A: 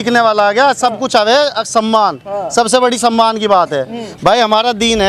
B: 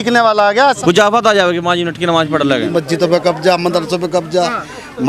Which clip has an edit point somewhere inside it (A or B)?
B